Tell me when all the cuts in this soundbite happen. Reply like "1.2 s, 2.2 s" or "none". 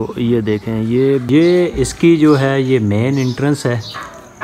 1.2 s